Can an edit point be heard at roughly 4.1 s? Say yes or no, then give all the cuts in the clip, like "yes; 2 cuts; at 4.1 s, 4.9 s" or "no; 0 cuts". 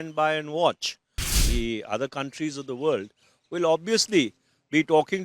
no; 1 cut; at 1.3 s